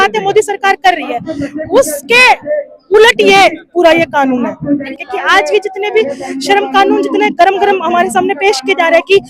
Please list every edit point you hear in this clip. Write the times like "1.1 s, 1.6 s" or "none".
4.8 s